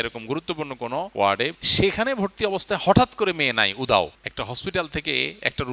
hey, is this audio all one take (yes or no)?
no